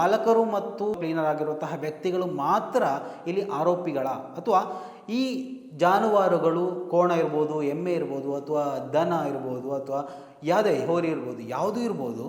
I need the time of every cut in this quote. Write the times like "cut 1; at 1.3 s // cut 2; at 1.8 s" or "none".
cut 1; at 1.0 s